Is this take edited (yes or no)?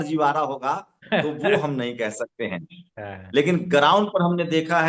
no